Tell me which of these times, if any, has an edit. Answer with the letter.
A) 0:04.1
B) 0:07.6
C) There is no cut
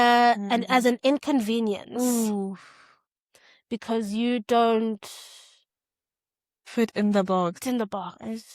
B